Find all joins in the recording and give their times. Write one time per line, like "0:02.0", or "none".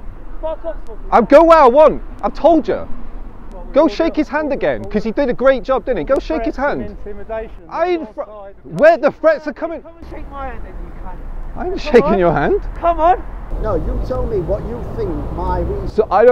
0:13.5